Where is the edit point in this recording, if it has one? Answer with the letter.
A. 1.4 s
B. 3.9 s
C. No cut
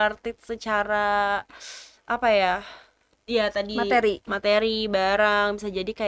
C